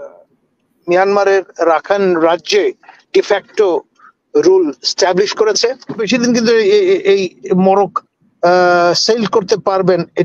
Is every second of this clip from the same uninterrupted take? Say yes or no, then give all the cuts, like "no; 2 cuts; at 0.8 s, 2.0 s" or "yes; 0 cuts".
no; 1 cut; at 6.0 s